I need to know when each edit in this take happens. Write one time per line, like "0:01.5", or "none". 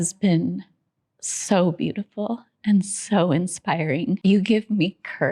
0:04.2